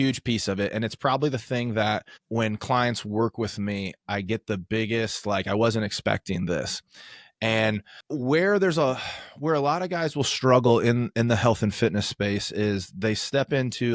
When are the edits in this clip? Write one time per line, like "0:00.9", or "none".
0:07.9